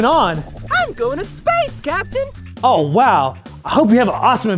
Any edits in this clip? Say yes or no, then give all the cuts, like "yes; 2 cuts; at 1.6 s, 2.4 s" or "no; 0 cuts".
no; 0 cuts